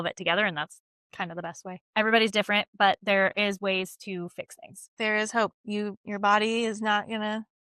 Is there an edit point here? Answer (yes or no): yes